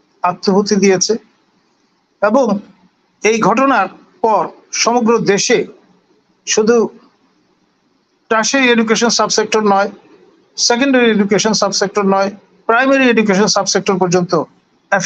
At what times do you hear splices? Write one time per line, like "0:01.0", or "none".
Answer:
none